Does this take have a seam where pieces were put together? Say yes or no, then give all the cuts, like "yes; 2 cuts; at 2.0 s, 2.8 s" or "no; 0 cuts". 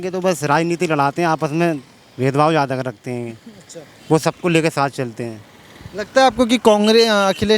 no; 0 cuts